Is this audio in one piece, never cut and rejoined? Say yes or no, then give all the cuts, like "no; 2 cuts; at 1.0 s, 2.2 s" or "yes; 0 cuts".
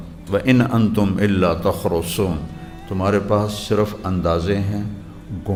yes; 0 cuts